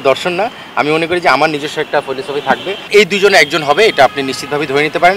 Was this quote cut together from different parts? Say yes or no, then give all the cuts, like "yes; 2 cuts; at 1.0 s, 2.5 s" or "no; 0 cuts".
yes; 1 cut; at 2.9 s